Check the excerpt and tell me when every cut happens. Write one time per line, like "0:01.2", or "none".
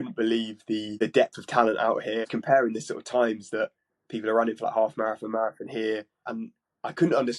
0:00.9
0:02.3
0:06.3